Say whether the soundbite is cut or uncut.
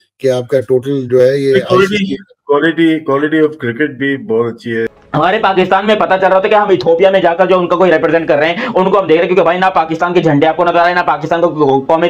uncut